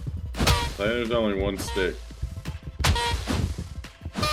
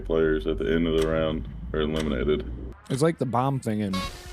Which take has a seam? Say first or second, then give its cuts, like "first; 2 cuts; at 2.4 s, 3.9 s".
second; 1 cut; at 2.7 s